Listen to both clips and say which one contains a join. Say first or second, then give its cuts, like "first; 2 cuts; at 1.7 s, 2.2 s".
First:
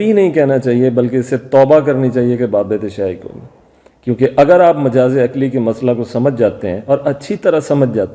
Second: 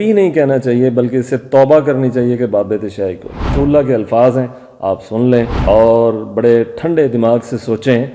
second; 1 cut; at 3.4 s